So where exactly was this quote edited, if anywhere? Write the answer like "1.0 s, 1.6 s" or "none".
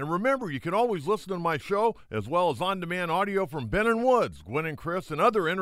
none